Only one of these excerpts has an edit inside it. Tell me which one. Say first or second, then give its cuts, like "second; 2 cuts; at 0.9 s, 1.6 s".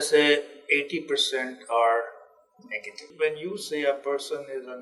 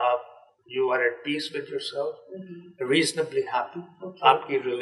first; 1 cut; at 3.0 s